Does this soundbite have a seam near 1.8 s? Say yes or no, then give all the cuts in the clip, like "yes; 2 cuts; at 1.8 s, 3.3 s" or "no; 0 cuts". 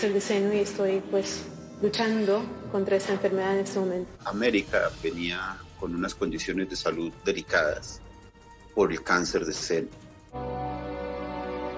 no; 2 cuts; at 4.2 s, 10.3 s